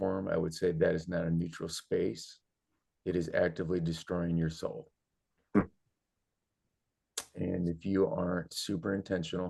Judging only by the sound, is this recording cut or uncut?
uncut